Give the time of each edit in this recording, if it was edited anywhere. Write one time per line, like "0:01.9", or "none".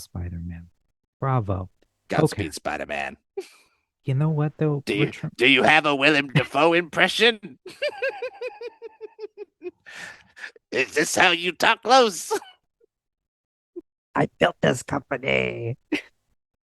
0:13.8